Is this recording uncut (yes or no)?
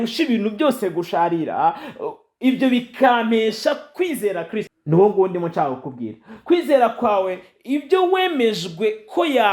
no